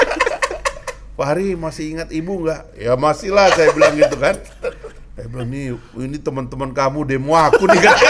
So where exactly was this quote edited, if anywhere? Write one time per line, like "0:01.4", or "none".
none